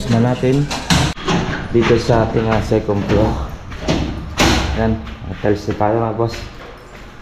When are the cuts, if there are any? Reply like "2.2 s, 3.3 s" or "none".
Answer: 1.2 s